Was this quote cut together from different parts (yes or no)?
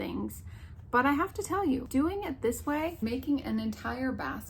yes